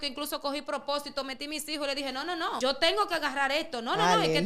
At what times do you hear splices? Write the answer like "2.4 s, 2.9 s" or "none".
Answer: 2.6 s